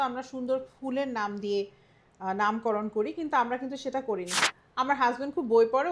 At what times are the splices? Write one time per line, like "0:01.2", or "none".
0:04.3